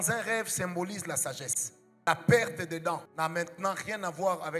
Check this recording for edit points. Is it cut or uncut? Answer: cut